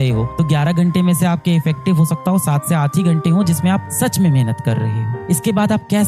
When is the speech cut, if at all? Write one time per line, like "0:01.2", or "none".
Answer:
none